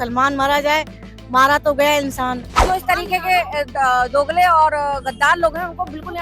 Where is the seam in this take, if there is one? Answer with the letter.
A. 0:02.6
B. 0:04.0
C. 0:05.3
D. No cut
A